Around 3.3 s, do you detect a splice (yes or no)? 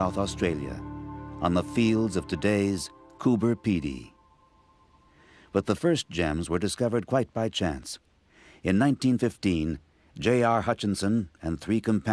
no